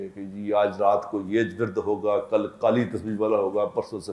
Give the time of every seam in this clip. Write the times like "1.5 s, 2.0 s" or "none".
none